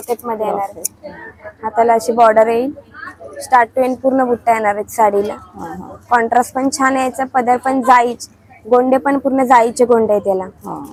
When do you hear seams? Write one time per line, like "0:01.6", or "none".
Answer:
none